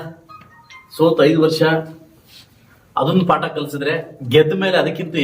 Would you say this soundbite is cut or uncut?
cut